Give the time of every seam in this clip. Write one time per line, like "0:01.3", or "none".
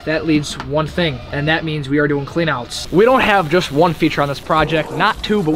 0:01.2
0:02.7